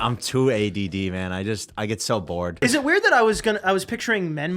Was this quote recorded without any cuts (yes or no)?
no